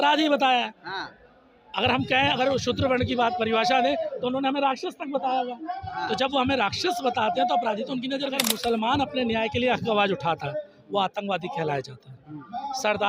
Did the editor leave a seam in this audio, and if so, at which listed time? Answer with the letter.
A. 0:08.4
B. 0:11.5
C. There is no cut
A